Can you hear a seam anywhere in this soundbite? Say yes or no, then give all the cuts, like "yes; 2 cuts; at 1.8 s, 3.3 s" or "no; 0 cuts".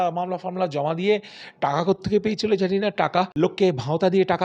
yes; 1 cut; at 3.3 s